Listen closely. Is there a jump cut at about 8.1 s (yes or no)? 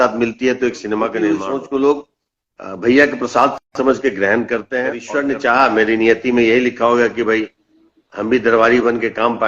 no